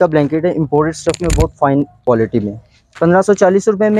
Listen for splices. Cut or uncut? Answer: cut